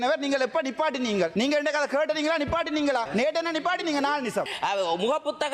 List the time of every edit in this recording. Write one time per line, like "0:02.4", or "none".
0:01.3
0:03.1
0:04.5